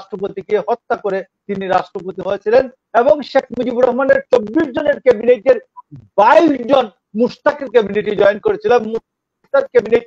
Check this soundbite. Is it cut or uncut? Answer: uncut